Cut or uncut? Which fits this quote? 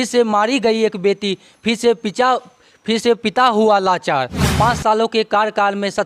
cut